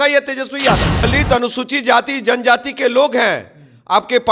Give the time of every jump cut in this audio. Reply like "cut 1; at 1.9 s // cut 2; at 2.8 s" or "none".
cut 1; at 1.1 s

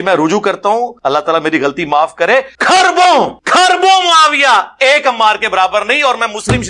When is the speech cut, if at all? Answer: cut 1; at 0.9 s // cut 2; at 2.5 s // cut 3; at 3.4 s

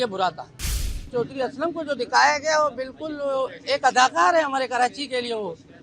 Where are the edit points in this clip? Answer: cut 1; at 1.0 s

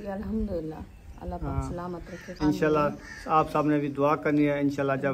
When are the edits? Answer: cut 1; at 2.3 s

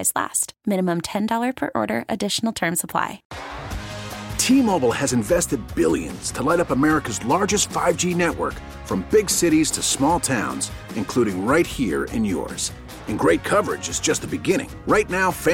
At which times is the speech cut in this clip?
cut 1; at 3.3 s

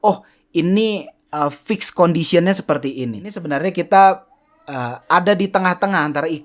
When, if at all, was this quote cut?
cut 1; at 3.4 s

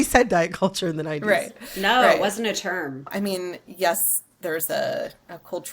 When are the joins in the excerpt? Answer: cut 1; at 3.1 s

